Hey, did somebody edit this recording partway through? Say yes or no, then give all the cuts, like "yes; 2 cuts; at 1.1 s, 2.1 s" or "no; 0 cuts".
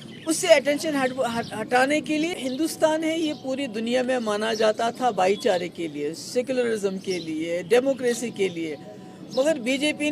yes; 1 cut; at 2.4 s